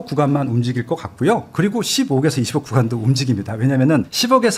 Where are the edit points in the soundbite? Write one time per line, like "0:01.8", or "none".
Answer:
none